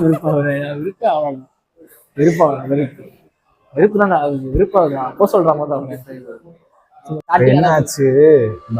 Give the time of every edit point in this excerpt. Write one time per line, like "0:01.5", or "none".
0:07.3